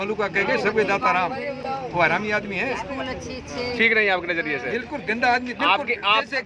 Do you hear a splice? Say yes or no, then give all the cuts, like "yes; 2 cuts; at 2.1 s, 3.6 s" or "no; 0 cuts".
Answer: no; 0 cuts